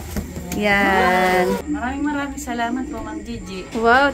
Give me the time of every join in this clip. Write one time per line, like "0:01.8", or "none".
0:01.7